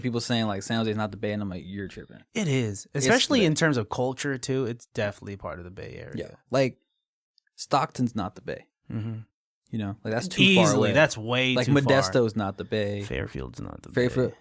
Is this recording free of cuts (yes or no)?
yes